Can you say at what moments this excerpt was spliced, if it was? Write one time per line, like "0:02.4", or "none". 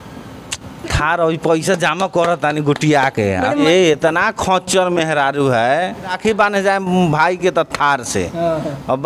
0:03.6
0:06.2